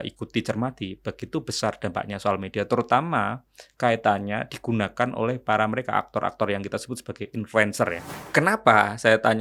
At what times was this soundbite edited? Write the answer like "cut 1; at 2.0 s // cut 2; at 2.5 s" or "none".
cut 1; at 8.1 s